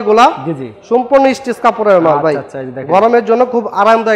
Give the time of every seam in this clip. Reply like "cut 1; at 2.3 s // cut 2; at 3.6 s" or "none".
none